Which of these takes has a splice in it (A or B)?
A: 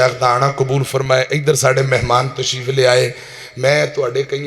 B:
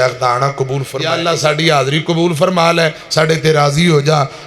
B